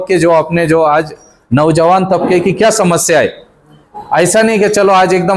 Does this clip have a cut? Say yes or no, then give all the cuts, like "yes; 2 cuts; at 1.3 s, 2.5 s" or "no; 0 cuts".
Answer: no; 0 cuts